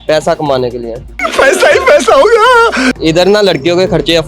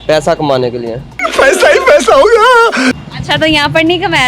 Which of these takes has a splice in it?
first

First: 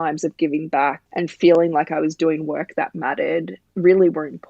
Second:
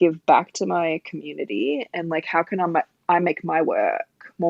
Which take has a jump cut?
first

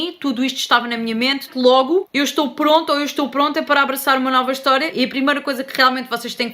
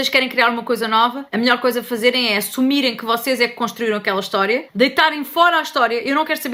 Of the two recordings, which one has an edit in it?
first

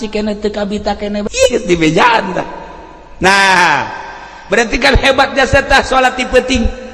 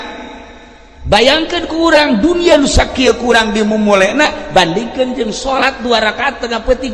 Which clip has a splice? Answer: first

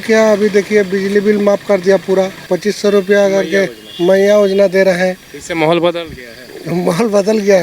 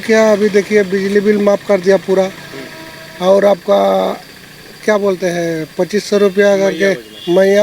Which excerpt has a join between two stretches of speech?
first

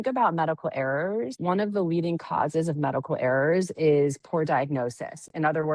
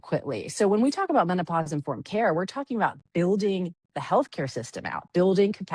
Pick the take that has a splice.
first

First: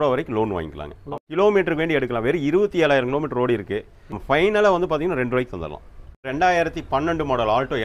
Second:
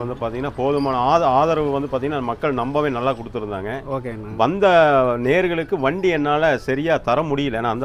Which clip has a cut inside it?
first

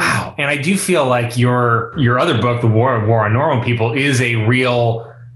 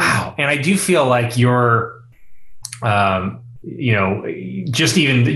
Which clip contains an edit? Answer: first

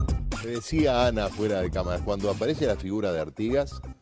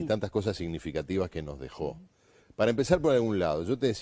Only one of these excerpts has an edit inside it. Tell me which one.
second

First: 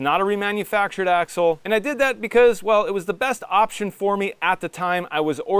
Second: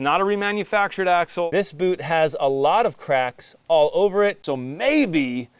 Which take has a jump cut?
second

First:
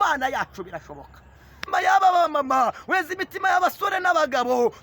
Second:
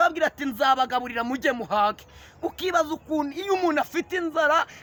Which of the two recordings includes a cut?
first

